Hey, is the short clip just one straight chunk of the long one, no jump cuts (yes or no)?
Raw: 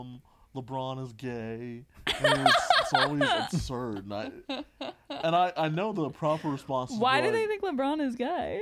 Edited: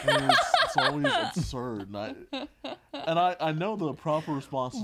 yes